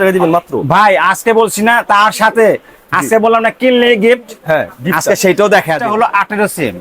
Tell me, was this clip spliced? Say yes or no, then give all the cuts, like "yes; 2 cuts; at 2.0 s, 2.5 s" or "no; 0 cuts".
yes; 1 cut; at 5.8 s